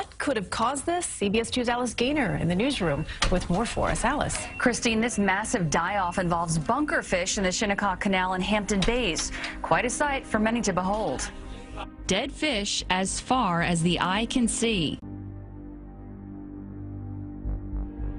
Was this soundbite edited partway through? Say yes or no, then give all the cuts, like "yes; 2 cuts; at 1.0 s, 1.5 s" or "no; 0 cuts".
no; 0 cuts